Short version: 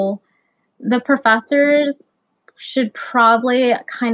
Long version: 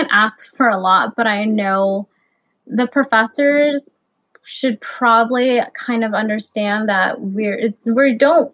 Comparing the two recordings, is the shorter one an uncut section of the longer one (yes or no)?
yes